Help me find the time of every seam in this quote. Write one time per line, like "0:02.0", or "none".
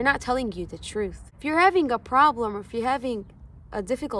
0:01.3